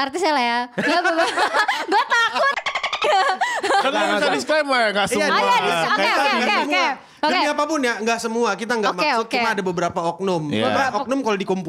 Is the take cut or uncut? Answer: uncut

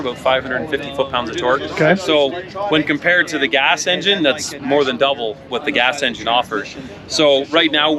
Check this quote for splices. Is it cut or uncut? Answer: uncut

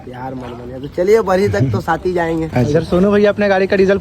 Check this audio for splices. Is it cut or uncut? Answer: cut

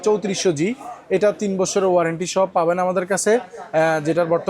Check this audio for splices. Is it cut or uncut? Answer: uncut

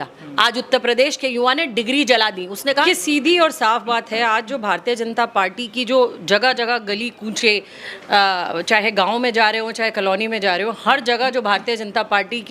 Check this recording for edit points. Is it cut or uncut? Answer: cut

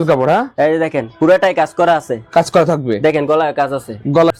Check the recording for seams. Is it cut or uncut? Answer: uncut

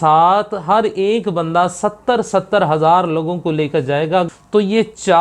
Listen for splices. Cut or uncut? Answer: cut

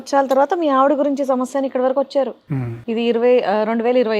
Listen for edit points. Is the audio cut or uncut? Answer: uncut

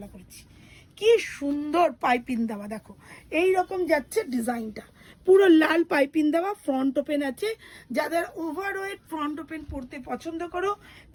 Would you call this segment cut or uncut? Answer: uncut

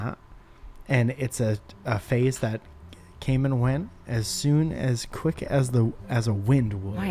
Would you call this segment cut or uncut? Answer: uncut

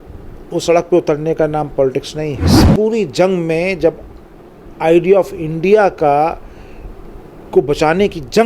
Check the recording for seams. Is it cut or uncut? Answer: cut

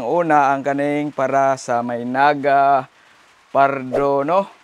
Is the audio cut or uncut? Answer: uncut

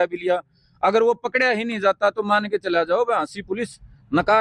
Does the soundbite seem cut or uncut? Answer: uncut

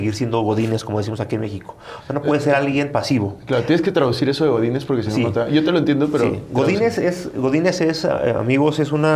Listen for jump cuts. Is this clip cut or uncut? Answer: uncut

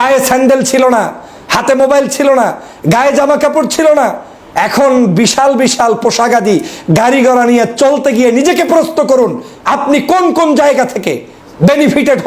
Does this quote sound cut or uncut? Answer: uncut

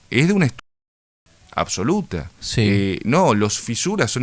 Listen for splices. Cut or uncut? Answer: uncut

